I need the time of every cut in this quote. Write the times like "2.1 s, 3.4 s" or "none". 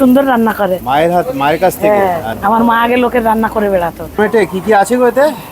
2.3 s, 4.2 s

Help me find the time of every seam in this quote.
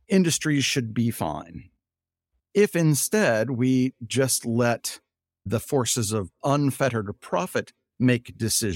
none

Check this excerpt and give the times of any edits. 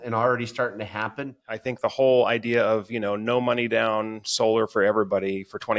1.5 s

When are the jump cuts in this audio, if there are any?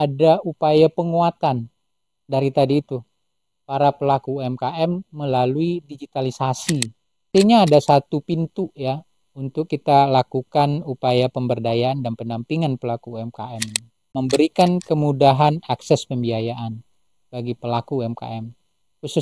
7.3 s, 14.1 s

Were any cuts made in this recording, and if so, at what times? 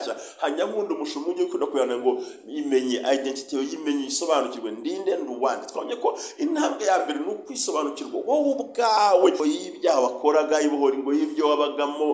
9.4 s

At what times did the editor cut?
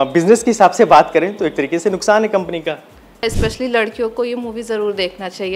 3.2 s

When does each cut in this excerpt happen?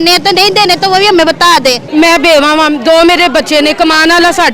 1.8 s

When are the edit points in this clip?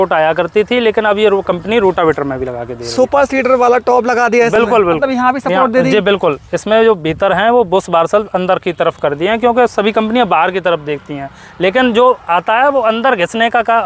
none

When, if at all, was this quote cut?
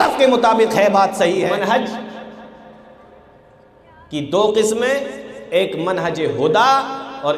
1.5 s

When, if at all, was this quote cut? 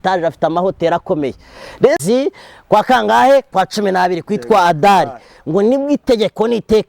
2.0 s

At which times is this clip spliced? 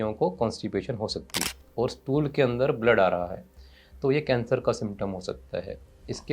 1.4 s

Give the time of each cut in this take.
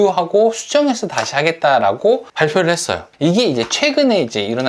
2.8 s

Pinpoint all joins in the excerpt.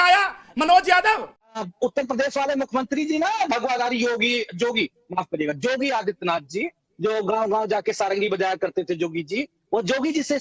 1.5 s

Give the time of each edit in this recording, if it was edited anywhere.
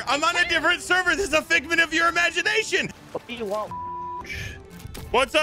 2.9 s

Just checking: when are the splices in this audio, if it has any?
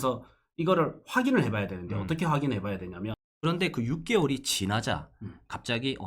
3.2 s

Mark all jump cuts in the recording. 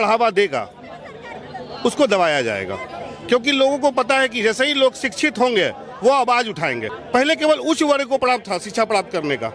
6.9 s

